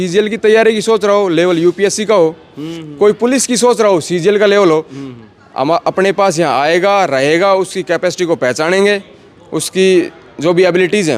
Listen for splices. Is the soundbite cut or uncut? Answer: uncut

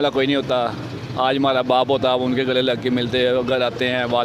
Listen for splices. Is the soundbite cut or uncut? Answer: uncut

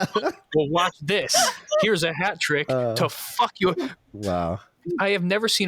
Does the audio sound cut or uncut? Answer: cut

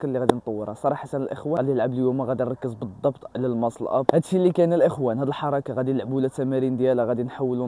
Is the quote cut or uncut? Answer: uncut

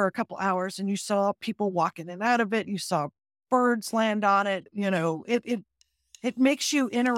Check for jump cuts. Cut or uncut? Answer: cut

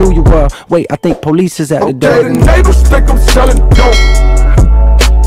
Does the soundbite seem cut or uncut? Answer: uncut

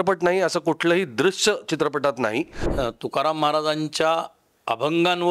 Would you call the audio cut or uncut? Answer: cut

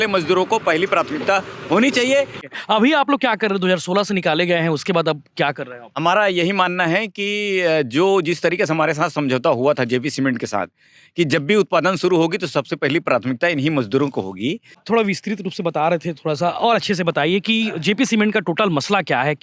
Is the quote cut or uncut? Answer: cut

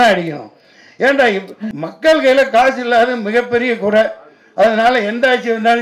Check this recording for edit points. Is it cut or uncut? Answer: cut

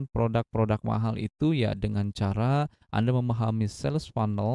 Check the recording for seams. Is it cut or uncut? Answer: uncut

